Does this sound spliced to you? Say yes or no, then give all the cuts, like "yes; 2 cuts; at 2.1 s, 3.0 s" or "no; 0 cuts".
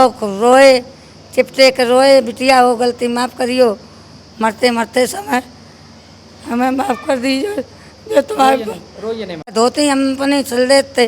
yes; 1 cut; at 9.5 s